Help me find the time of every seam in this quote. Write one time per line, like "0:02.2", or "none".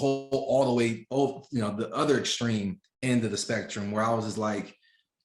none